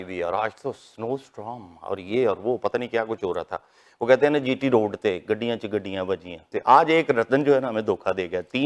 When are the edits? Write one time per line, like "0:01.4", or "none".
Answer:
0:06.5